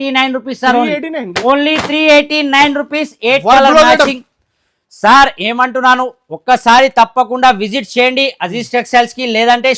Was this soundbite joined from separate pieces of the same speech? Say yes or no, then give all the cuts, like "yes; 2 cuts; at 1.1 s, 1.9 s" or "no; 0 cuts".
no; 0 cuts